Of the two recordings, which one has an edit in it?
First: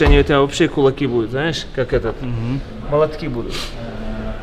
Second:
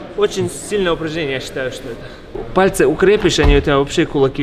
second; 1 cut; at 2.2 s

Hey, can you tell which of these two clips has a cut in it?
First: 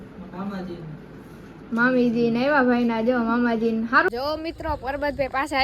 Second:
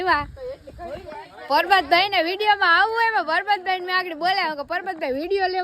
first; 1 cut; at 4.1 s

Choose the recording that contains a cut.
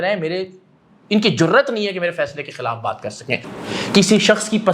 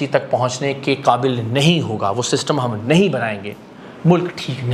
first; 1 cut; at 3.5 s

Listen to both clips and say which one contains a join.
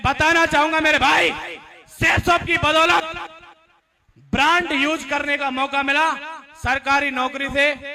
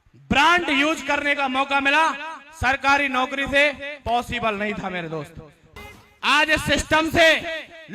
second; 1 cut; at 5.6 s

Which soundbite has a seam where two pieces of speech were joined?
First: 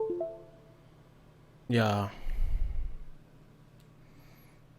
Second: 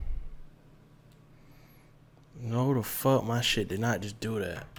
first; 1 cut; at 1.7 s

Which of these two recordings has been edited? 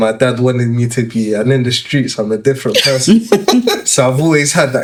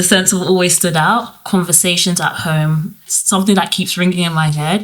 second; 1 cut; at 1.3 s

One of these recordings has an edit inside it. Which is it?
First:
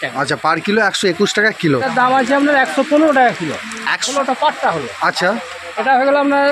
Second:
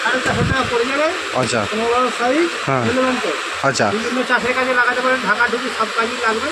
first; 2 cuts; at 1.9 s, 4.1 s

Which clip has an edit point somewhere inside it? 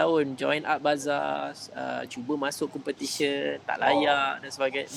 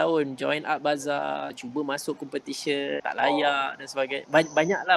second; 2 cuts; at 1.6 s, 3.0 s

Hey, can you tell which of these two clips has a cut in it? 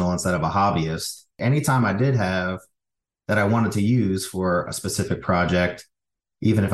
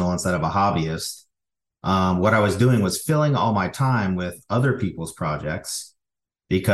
first; 1 cut; at 1.4 s

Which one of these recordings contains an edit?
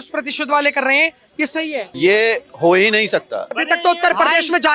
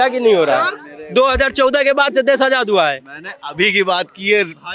first; 2 cuts; at 1.9 s, 3.5 s

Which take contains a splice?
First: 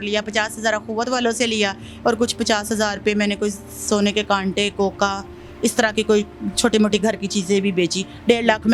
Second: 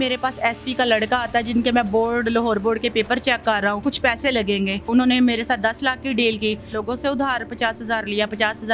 second; 3 cuts; at 3.8 s, 4.9 s, 6.7 s

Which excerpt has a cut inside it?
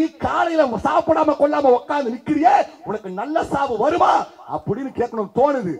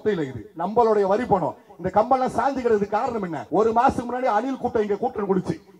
second; 1 cut; at 3.4 s

